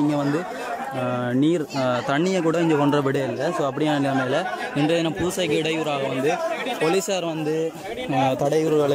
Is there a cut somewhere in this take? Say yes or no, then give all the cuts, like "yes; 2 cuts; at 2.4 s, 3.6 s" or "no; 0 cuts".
no; 0 cuts